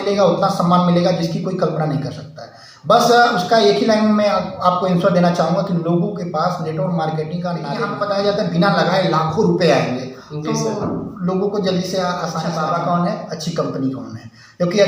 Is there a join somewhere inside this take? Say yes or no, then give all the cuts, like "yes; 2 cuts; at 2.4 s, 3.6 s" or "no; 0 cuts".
yes; 2 cuts; at 7.9 s, 12.5 s